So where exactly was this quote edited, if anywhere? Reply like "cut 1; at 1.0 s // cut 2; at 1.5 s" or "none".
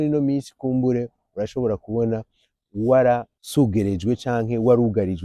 cut 1; at 3.4 s